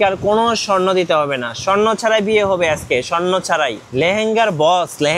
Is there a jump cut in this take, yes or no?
yes